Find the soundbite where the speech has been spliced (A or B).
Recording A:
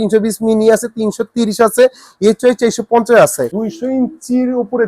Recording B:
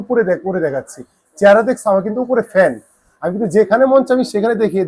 A